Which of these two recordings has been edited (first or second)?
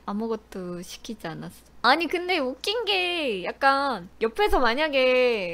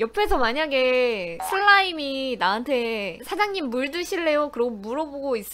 first